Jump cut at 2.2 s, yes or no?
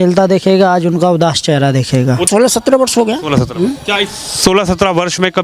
yes